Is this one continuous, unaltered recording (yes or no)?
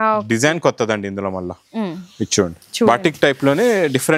yes